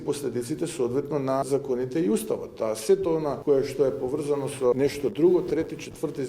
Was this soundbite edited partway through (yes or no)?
yes